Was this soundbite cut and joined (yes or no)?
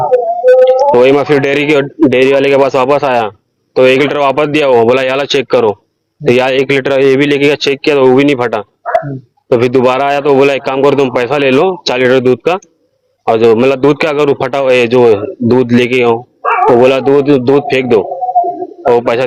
no